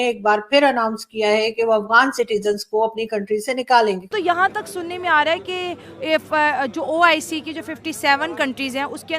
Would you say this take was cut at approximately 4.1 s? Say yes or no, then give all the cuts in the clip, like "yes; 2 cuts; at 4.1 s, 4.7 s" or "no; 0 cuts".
yes; 1 cut; at 4.1 s